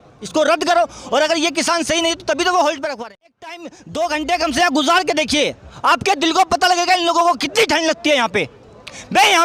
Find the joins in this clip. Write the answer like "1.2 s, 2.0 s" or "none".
3.2 s